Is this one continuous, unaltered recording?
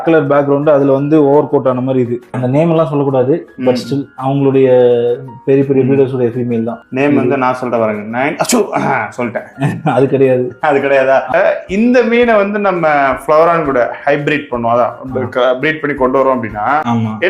no; 3 cuts; at 2.3 s, 6.8 s, 11.3 s

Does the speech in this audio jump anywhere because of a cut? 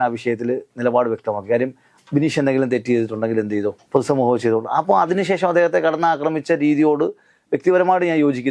no; 0 cuts

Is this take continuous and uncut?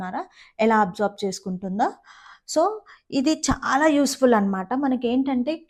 yes; 0 cuts

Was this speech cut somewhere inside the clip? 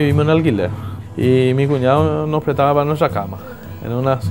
no; 0 cuts

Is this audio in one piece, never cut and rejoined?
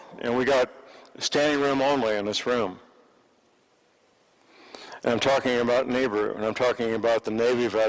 yes; 0 cuts

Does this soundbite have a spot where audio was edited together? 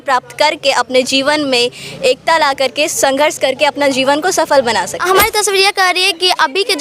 yes; 1 cut; at 5.0 s

